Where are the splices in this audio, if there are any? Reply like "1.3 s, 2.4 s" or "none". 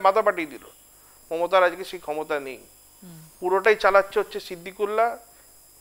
none